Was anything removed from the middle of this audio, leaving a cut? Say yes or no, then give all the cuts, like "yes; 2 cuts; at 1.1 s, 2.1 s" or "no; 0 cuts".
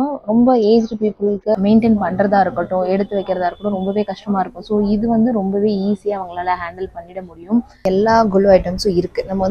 yes; 2 cuts; at 1.6 s, 7.8 s